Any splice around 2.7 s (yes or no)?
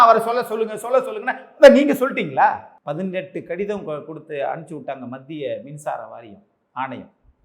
yes